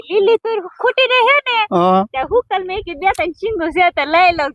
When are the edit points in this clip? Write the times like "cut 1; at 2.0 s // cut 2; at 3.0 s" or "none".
none